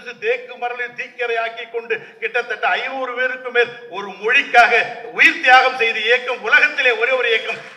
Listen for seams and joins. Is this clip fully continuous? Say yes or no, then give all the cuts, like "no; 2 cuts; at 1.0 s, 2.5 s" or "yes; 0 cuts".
yes; 0 cuts